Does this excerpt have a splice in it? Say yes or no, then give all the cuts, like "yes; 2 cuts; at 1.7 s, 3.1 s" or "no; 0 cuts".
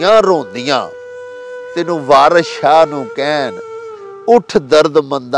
no; 0 cuts